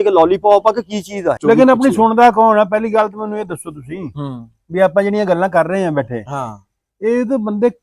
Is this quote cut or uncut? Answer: cut